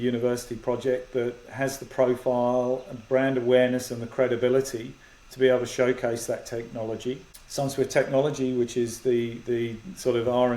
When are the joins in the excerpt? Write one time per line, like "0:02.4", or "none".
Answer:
0:07.3